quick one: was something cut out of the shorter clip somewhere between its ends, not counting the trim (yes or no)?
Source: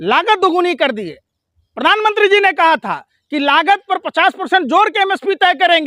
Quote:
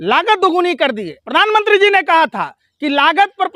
yes